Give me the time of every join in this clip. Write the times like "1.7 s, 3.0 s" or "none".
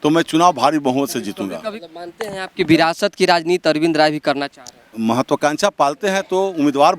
1.7 s, 4.9 s